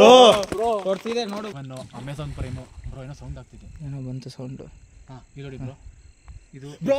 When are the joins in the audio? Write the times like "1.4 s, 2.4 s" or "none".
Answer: 1.5 s